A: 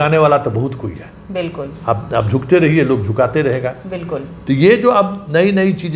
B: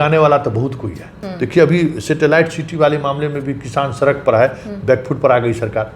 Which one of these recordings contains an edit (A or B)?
B